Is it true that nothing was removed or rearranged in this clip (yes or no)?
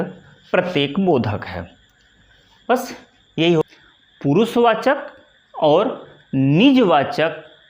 no